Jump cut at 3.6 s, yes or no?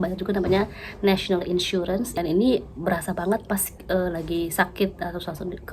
no